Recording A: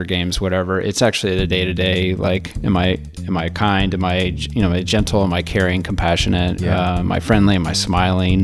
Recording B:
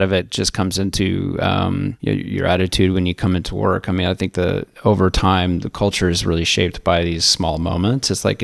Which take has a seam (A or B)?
B